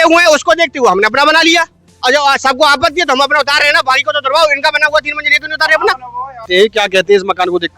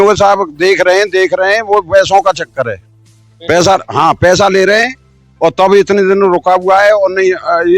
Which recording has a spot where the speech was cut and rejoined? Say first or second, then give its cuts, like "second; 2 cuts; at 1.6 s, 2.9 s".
first; 1 cut; at 6.5 s